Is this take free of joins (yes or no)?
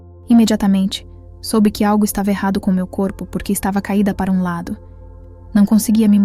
no